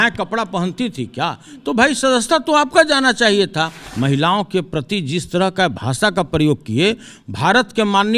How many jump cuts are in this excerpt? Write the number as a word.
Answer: one